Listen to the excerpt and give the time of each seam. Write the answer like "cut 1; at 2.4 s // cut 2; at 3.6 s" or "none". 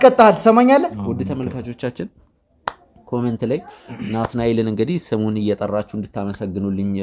cut 1; at 1.0 s